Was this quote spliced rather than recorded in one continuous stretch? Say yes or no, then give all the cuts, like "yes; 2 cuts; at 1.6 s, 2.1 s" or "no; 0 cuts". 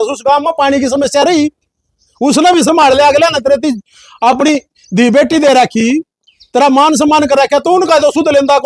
no; 0 cuts